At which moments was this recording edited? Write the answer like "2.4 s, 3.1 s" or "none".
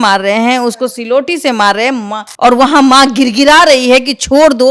2.2 s

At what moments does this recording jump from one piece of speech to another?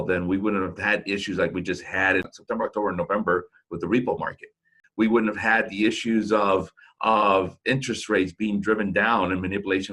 2.3 s, 4.8 s

